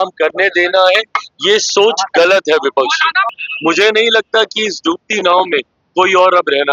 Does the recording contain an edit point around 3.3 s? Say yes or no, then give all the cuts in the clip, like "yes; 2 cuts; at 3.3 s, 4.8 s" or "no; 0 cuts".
yes; 2 cuts; at 3.3 s, 5.3 s